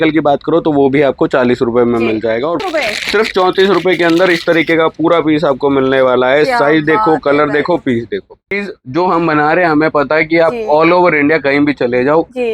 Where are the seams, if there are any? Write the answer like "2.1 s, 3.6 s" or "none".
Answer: 2.6 s, 8.6 s